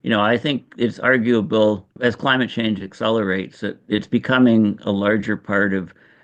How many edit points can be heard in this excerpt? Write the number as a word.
one